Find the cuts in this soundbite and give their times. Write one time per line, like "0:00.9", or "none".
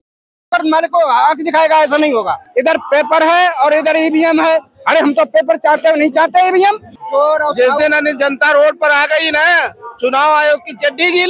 0:02.4
0:06.9